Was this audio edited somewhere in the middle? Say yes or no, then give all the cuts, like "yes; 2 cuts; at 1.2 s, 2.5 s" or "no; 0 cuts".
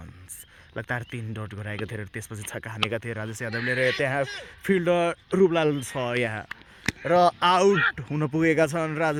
no; 0 cuts